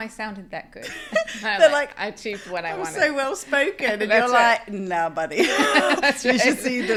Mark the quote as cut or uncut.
uncut